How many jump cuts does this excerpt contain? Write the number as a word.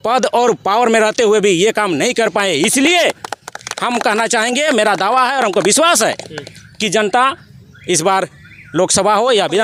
zero